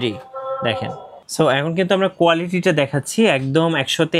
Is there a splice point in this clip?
yes; 1 cut; at 1.2 s

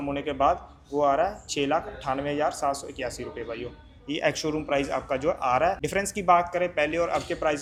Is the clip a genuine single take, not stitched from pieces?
yes; 0 cuts

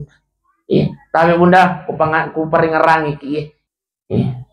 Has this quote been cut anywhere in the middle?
yes; 1 cut; at 3.5 s

